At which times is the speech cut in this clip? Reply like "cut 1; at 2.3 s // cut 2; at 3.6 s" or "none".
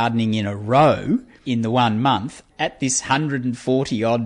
cut 1; at 1.4 s // cut 2; at 2.4 s